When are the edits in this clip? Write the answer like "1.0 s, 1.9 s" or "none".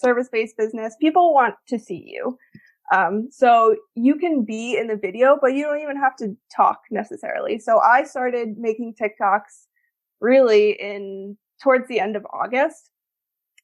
none